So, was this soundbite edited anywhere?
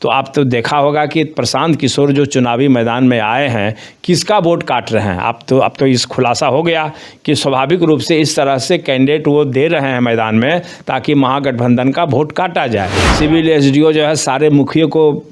yes; 1 cut; at 13.0 s

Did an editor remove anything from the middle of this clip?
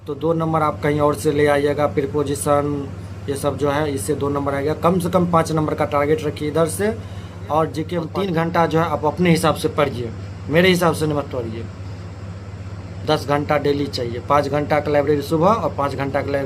yes; 1 cut; at 8.0 s

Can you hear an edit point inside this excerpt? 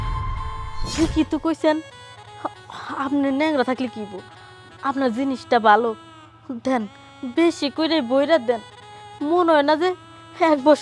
yes; 1 cut; at 0.9 s

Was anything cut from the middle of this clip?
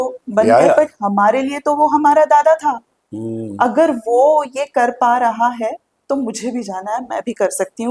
no; 0 cuts

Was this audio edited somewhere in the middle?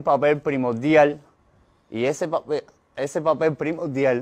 no; 0 cuts

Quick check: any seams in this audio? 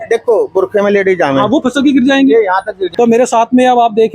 yes; 1 cut; at 2.8 s

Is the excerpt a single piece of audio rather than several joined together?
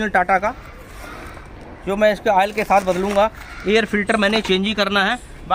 yes; 0 cuts

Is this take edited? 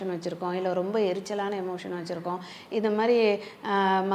no; 0 cuts

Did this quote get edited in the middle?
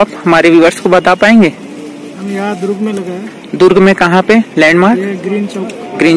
no; 0 cuts

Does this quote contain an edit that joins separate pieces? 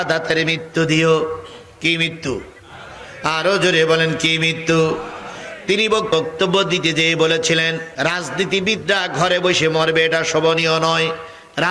yes; 2 cuts; at 6.1 s, 7.9 s

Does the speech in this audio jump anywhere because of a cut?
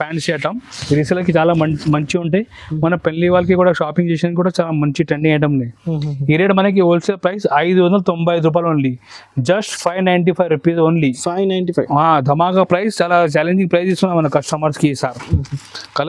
no; 0 cuts

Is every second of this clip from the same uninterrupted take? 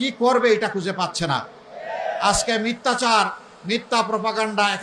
yes; 0 cuts

